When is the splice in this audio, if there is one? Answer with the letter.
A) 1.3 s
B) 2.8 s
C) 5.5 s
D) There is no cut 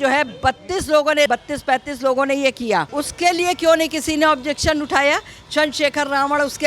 A